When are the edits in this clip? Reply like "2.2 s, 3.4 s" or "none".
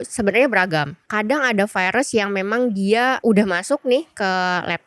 1.0 s, 3.2 s